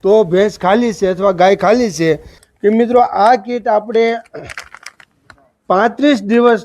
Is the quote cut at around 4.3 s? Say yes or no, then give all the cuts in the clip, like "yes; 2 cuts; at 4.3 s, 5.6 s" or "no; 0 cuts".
no; 1 cut; at 2.4 s